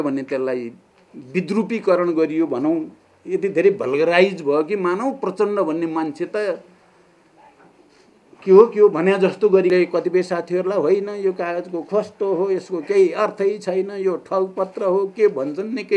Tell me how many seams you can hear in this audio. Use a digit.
1